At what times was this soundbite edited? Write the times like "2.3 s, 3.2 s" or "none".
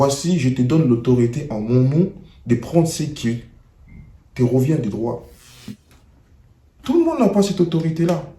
5.6 s

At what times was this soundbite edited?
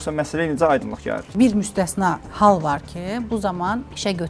1.3 s, 2.3 s

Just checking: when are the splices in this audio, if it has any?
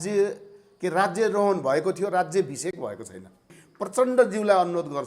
3.6 s

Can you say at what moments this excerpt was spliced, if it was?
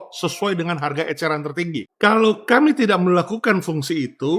1.9 s

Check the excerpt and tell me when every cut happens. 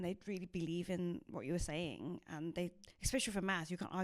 2.9 s

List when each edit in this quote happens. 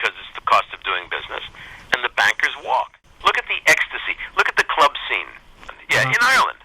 3.0 s, 5.6 s

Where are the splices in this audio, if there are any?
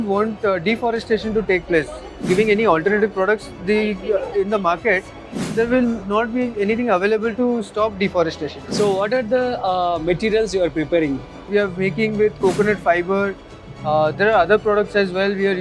2.2 s, 8.5 s, 11.4 s

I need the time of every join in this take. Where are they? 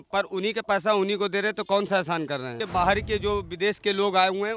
2.6 s

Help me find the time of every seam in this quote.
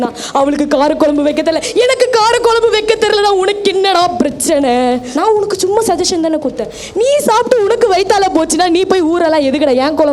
5.1 s

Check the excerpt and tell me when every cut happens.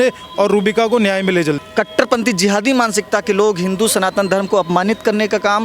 1.6 s

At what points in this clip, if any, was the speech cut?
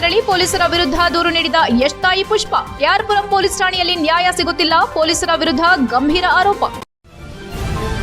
6.8 s

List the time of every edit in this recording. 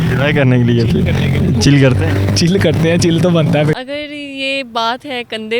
3.7 s

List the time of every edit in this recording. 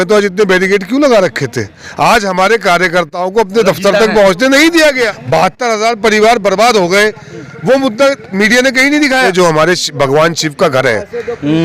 5.1 s, 9.3 s

